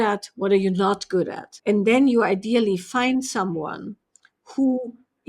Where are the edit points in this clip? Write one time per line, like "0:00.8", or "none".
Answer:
0:01.4